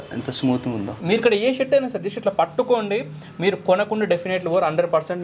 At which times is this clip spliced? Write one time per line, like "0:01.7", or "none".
0:01.0